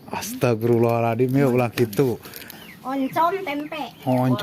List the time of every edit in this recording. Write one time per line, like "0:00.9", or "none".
0:02.5